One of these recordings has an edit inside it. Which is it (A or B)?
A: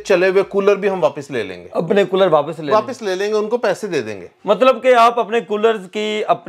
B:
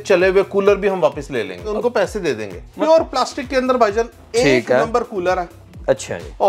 B